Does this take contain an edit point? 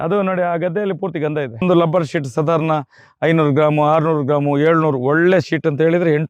yes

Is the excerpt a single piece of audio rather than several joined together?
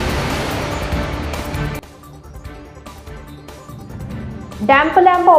no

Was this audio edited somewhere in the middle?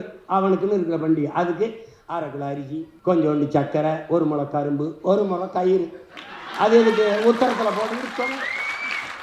yes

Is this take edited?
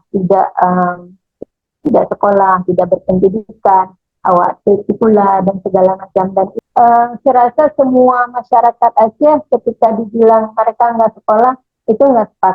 yes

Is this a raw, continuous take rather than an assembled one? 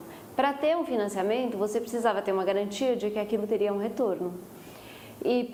yes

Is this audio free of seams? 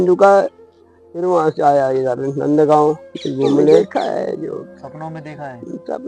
no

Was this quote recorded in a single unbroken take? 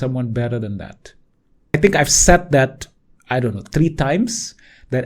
no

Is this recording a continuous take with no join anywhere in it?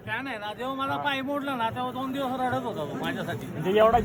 yes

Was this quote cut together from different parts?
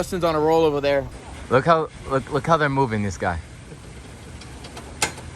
yes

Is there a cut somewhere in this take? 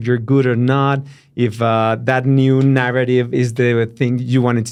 no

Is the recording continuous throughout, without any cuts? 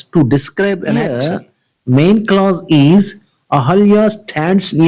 no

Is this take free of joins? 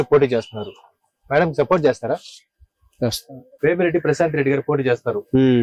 no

